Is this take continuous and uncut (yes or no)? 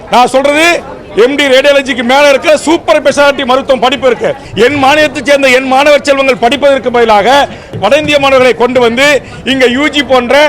no